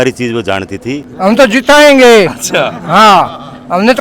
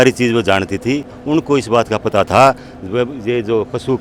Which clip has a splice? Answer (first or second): first